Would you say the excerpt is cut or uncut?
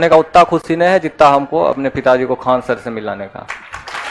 uncut